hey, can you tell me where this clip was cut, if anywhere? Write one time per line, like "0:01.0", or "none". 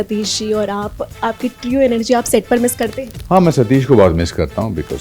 0:03.1